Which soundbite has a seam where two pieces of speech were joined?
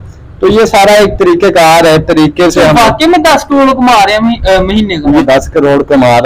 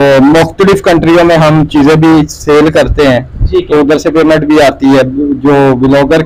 first; 1 cut; at 5.2 s

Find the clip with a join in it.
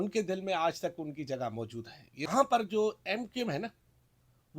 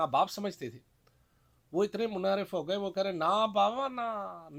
first; 1 cut; at 2.3 s

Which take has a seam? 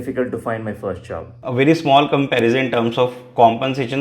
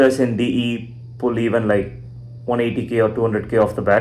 first; 1 cut; at 1.4 s

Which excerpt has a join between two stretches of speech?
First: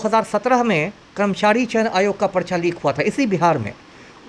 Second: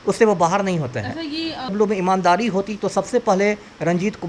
second; 1 cut; at 1.7 s

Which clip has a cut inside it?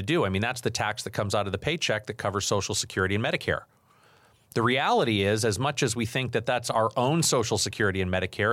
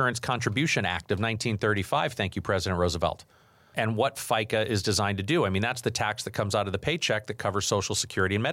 second; 1 cut; at 3.7 s

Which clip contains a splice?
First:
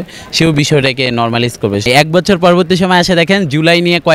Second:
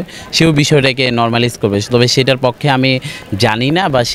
first; 1 cut; at 1.9 s

